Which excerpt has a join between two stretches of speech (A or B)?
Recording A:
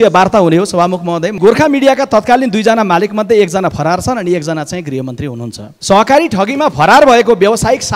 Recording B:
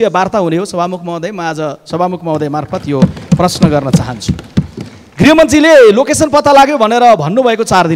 A